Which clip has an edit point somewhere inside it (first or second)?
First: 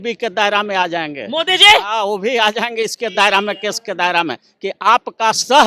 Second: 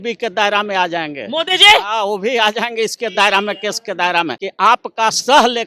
second